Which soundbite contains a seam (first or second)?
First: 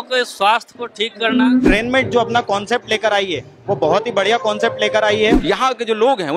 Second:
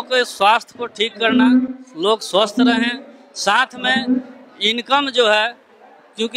first